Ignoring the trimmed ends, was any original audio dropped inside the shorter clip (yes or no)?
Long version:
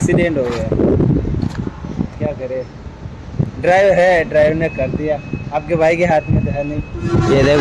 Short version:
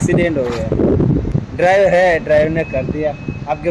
yes